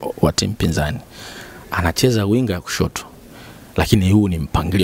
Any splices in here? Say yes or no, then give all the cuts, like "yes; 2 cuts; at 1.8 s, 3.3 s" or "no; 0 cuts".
no; 0 cuts